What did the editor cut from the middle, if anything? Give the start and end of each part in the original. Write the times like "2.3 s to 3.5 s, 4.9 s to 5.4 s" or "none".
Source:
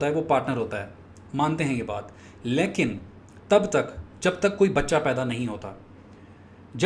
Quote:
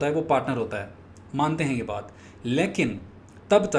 none